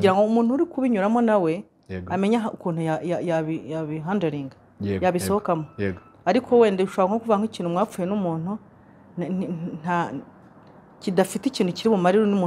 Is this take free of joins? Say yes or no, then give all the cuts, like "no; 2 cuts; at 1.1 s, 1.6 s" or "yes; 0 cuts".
yes; 0 cuts